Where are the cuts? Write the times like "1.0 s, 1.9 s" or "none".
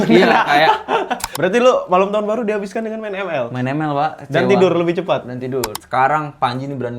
1.2 s, 5.7 s